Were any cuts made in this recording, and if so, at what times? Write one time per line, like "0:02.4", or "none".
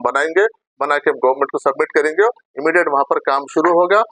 none

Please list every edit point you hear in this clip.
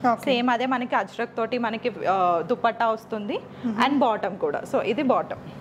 none

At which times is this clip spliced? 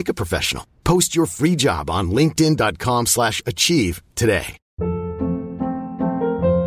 0:04.6

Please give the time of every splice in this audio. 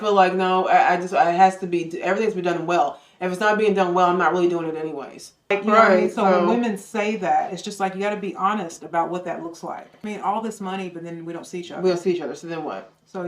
0:05.6

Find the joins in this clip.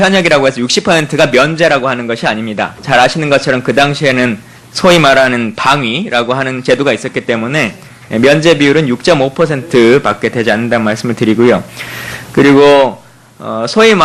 0:09.0

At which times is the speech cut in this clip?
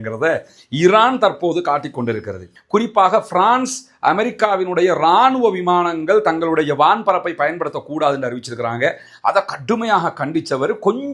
0:02.5

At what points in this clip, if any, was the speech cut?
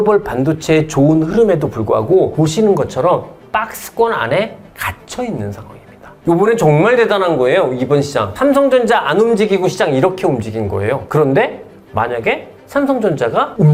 none

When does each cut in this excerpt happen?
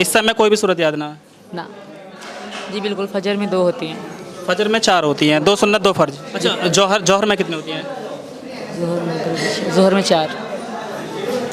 0:01.8
0:06.2

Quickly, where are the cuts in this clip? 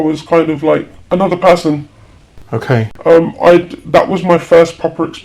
0:00.9

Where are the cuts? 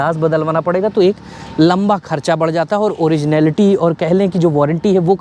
none

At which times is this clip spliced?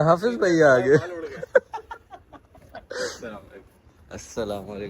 0:01.5

